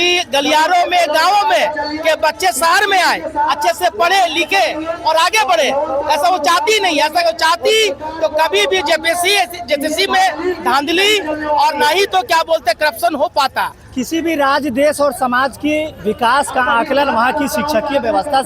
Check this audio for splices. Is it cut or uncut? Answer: uncut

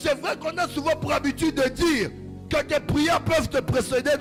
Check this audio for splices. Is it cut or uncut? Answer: uncut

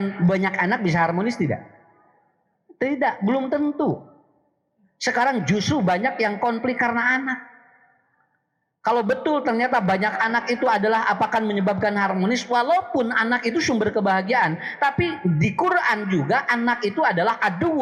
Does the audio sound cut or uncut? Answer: uncut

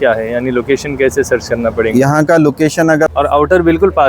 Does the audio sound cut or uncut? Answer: cut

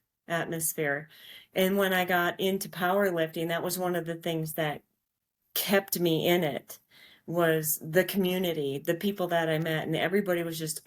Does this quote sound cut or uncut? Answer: uncut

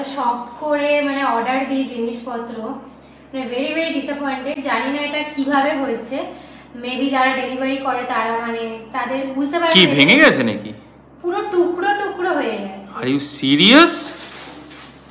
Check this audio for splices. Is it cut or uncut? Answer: uncut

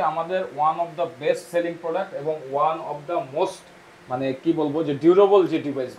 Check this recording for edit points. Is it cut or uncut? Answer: uncut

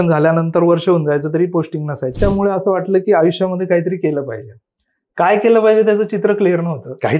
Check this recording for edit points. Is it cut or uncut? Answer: cut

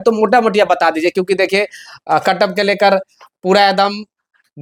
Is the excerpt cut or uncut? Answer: uncut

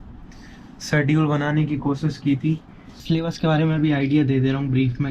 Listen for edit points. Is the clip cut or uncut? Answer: cut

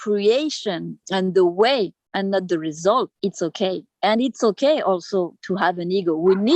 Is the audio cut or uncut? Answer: cut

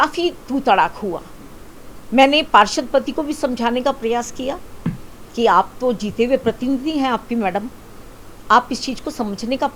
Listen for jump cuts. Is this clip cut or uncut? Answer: uncut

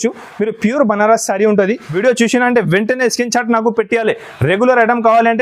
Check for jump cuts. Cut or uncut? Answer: cut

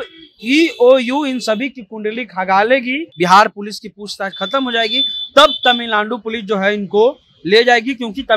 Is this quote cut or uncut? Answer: cut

